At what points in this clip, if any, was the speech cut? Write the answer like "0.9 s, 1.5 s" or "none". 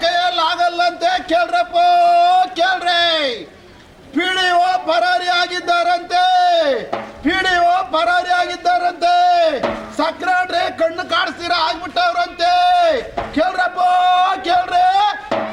none